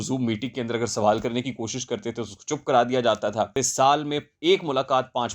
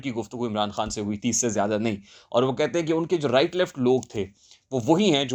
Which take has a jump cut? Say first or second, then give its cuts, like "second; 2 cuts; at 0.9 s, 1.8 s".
first; 1 cut; at 3.6 s